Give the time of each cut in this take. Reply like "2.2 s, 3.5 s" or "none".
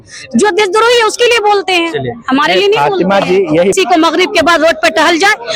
3.7 s